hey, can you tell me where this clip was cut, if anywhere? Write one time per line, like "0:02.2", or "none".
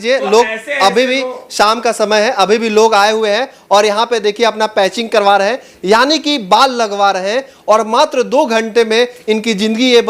none